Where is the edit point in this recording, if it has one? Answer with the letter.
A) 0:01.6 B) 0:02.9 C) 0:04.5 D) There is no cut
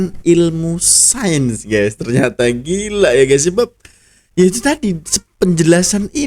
D